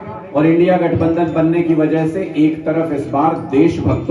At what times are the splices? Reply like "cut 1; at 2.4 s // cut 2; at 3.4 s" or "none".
none